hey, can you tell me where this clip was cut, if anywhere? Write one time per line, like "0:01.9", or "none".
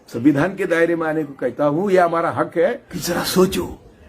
0:02.9